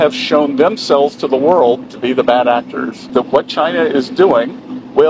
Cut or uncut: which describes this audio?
cut